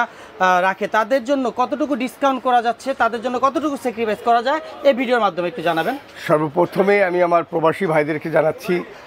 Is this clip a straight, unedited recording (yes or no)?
yes